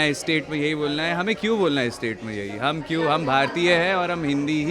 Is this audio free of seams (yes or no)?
yes